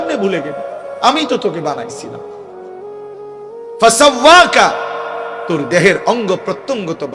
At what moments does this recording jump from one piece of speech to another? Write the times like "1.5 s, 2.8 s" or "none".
2.1 s, 3.8 s